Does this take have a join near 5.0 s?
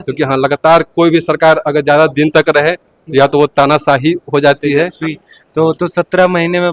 yes; 1 cut; at 5.0 s

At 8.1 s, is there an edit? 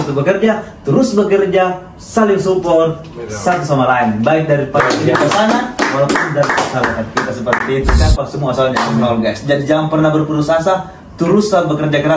yes; 1 cut; at 8.1 s

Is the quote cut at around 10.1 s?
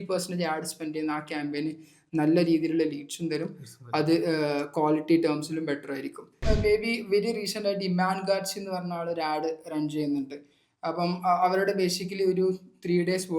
no; 1 cut; at 6.4 s

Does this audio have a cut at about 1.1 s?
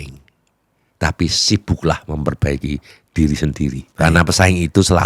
no; 1 cut; at 3.8 s

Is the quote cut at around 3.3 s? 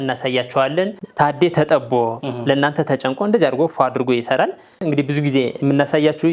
no; 2 cuts; at 1.0 s, 4.7 s

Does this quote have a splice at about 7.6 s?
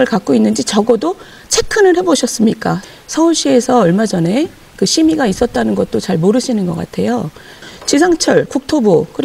yes; 2 cuts; at 2.8 s, 7.6 s

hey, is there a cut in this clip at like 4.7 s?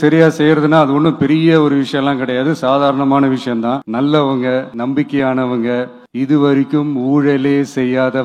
yes; 3 cuts; at 3.8 s, 4.7 s, 6.0 s

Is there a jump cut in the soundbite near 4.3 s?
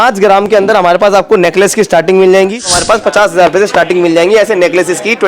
no; 1 cut; at 2.8 s

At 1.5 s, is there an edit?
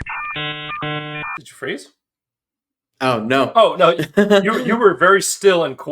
yes; 1 cut; at 1.5 s

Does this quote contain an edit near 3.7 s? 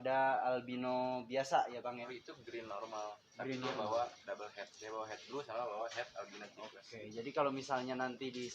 no; 1 cut; at 2.1 s

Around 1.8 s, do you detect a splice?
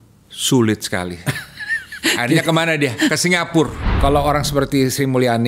no; 1 cut; at 3.8 s

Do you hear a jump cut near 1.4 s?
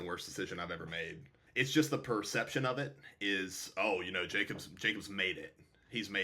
yes; 1 cut; at 1.4 s

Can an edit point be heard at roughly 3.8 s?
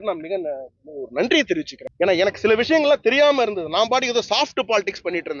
no; 1 cut; at 1.8 s

